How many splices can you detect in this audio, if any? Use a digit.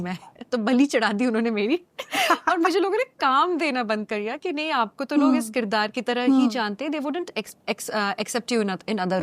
0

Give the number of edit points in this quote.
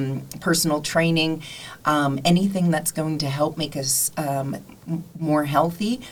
0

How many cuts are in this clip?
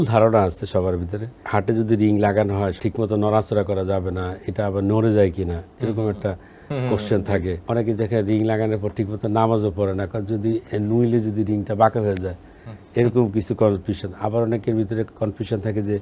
3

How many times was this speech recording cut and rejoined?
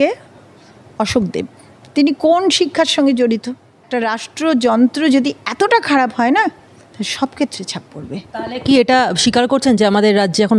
1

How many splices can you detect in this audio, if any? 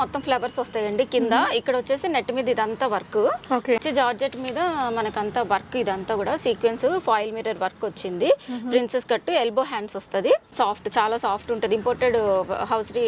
2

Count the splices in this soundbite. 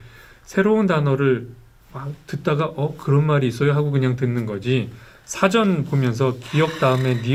0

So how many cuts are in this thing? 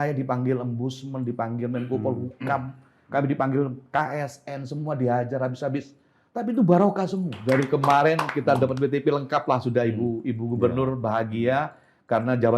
1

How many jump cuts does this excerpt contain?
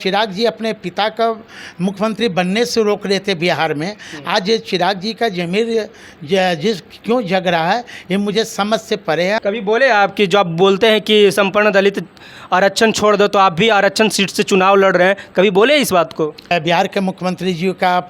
2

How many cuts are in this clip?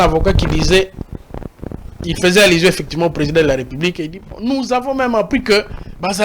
0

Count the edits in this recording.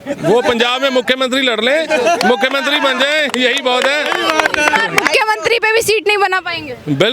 0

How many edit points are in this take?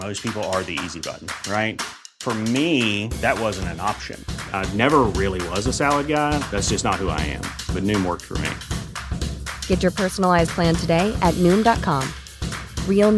0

